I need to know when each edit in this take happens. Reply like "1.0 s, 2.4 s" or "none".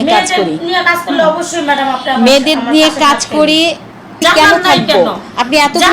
4.2 s